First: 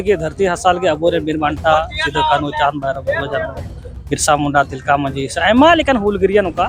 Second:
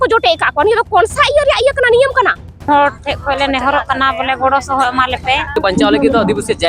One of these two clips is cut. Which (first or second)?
second